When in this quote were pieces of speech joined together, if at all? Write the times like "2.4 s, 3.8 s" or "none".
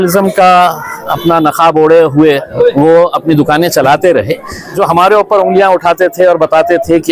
4.7 s